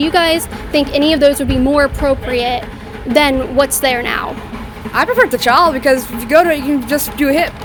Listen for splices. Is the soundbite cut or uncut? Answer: uncut